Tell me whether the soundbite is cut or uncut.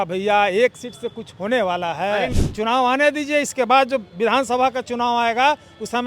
cut